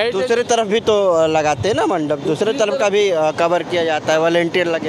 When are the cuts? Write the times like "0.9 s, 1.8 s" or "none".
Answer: none